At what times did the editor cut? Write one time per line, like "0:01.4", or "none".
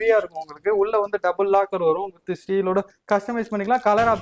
none